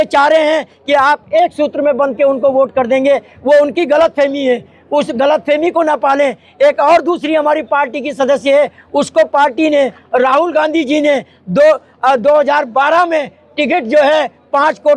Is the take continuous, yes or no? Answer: yes